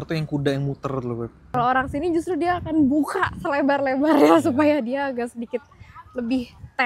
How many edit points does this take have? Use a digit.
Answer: 1